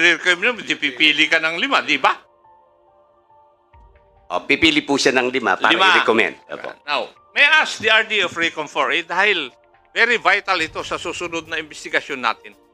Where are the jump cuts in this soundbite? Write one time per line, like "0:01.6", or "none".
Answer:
none